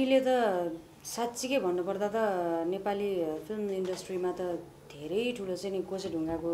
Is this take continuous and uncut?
yes; 0 cuts

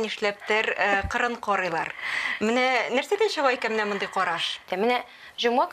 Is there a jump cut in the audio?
yes; 1 cut; at 4.7 s

